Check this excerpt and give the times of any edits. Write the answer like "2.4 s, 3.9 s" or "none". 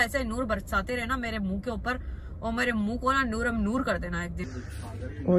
4.3 s